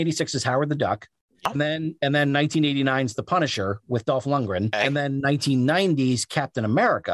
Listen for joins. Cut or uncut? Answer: cut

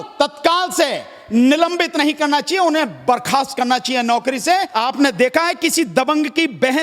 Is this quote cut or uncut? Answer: cut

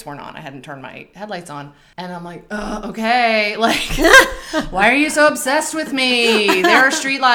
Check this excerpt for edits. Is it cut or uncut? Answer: cut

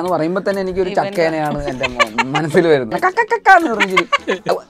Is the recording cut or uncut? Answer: cut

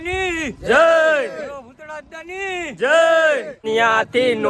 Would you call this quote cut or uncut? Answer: cut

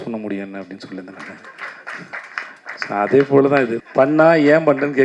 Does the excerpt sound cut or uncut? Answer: cut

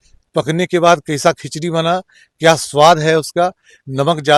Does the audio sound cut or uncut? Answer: uncut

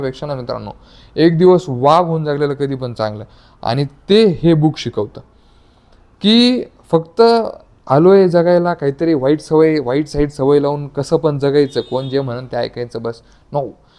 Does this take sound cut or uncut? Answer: uncut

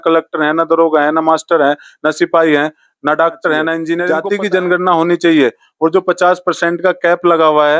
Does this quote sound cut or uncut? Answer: cut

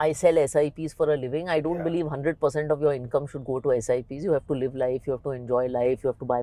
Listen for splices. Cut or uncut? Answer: uncut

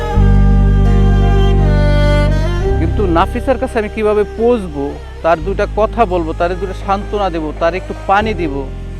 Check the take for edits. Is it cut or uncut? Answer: cut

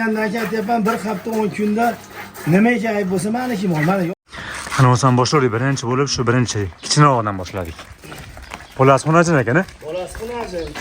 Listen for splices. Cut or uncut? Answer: cut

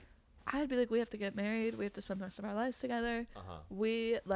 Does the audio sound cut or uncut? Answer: uncut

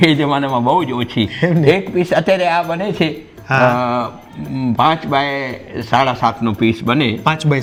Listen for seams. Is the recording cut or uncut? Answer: uncut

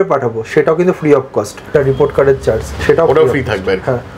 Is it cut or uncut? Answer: cut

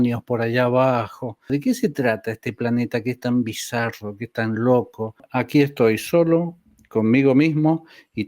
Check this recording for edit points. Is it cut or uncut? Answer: cut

